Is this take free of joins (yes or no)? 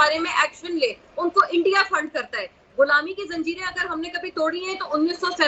yes